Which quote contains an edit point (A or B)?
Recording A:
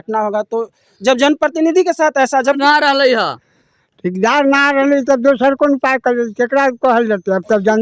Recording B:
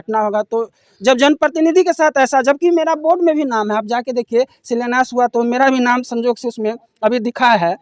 A